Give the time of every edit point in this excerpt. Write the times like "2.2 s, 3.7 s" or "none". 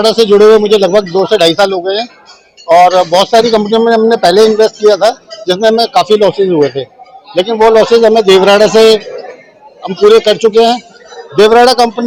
none